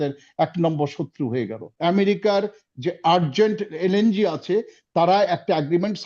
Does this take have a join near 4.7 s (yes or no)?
no